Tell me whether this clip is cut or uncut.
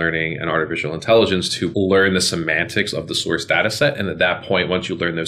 cut